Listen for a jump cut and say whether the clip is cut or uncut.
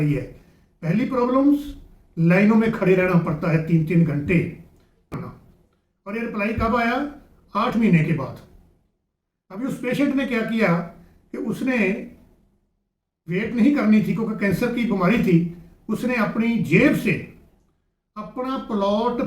cut